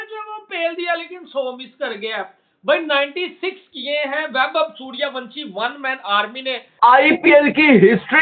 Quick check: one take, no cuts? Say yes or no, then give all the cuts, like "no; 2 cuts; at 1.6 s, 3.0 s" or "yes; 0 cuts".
no; 1 cut; at 6.8 s